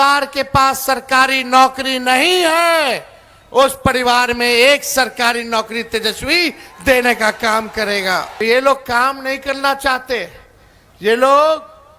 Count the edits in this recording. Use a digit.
1